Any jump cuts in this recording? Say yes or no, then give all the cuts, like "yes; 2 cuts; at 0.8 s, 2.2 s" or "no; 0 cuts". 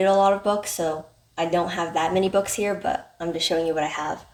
no; 0 cuts